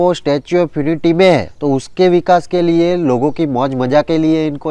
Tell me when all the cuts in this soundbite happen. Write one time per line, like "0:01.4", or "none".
0:01.5